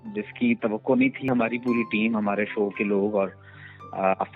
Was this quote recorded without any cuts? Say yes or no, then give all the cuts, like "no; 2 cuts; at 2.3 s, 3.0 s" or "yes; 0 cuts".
no; 1 cut; at 1.3 s